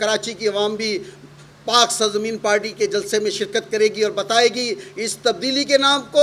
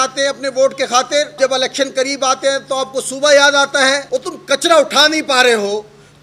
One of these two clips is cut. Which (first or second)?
second